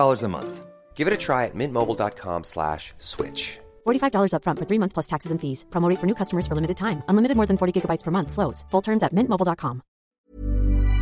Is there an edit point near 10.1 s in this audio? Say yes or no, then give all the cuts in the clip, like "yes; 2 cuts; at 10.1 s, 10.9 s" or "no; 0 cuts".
yes; 1 cut; at 10.1 s